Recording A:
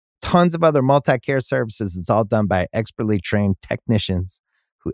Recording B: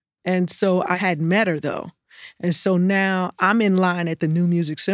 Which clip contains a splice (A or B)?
B